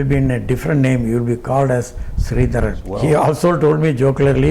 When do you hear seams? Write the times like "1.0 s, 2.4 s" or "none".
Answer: 2.8 s